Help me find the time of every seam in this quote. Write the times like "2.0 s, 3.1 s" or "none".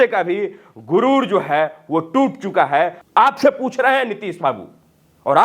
3.0 s